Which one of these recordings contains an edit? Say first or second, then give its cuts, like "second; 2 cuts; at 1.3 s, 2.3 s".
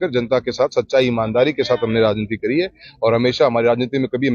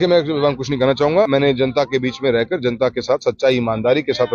second; 1 cut; at 1.3 s